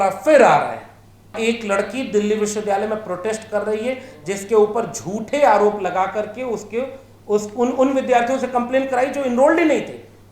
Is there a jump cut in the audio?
yes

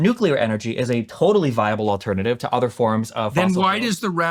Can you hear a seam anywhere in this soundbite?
no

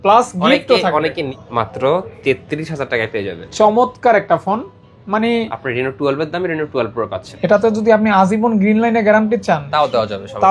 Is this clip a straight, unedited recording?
no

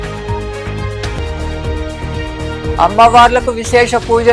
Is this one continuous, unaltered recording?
yes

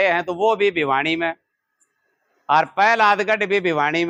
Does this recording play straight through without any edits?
yes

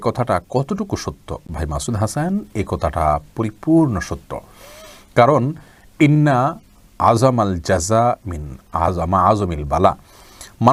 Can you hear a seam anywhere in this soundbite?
no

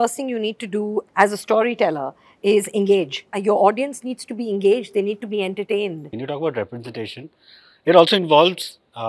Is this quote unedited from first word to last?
no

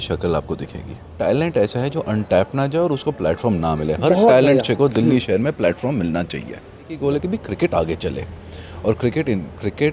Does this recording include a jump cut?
yes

